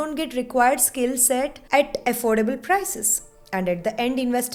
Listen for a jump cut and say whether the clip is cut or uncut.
uncut